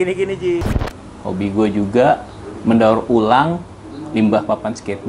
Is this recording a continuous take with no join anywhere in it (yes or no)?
no